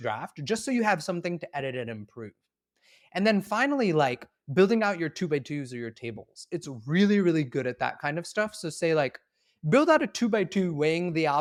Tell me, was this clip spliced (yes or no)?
no